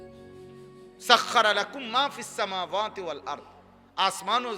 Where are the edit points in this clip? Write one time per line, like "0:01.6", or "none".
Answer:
0:01.1